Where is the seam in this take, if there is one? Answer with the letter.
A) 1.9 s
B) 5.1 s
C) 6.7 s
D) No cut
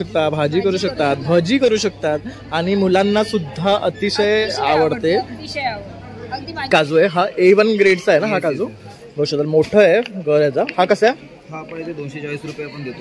C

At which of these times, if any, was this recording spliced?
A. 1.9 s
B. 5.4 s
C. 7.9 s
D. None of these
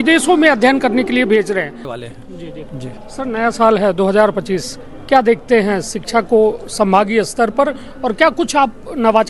A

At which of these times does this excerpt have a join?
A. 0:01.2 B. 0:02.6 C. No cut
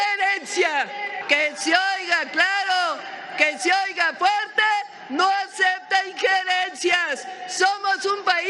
A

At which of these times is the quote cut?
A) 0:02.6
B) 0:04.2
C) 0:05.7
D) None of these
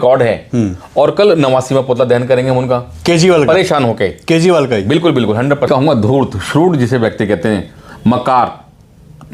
C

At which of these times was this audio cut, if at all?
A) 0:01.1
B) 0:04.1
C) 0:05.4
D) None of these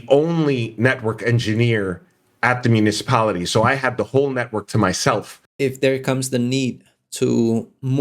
C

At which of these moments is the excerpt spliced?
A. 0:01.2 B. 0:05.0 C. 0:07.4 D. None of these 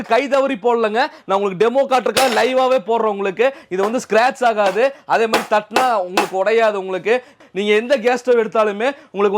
C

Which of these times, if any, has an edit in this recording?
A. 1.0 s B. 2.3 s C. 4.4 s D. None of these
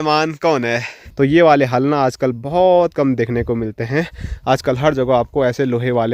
A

